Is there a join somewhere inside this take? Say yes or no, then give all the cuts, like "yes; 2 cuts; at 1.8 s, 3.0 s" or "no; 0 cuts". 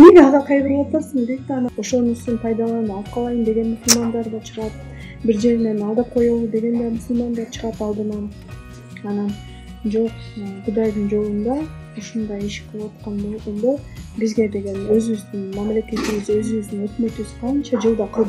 yes; 1 cut; at 1.8 s